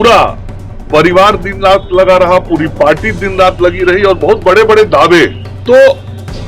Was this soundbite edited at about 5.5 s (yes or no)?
yes